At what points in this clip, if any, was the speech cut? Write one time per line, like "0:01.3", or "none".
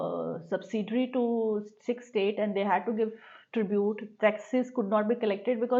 none